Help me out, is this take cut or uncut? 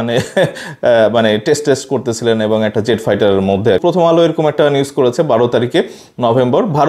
cut